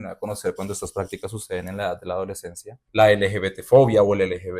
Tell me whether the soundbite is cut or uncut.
uncut